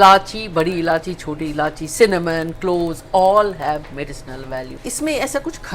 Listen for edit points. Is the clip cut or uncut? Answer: cut